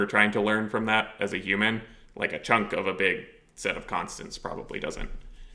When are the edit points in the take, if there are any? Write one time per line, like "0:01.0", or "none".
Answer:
none